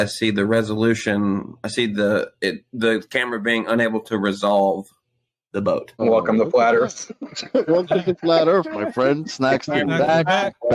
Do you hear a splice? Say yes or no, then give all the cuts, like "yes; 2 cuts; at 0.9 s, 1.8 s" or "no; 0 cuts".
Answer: yes; 1 cut; at 6.0 s